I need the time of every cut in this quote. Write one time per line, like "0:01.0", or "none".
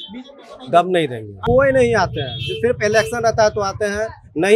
0:01.3

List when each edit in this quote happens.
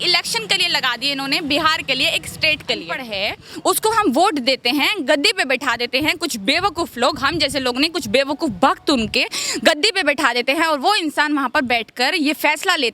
0:03.0

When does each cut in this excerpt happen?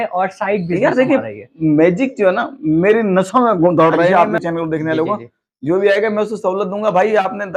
0:04.1

